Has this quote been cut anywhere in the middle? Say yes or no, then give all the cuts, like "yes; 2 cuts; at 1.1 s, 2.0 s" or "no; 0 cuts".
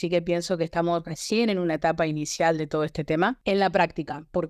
yes; 1 cut; at 3.4 s